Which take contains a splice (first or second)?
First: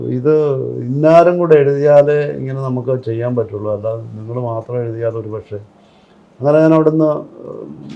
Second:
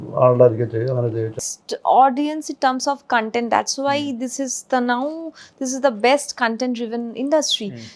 second